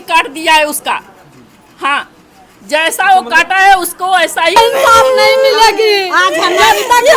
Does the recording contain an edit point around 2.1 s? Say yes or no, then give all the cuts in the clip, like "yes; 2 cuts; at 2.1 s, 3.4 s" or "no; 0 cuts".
no; 1 cut; at 4.6 s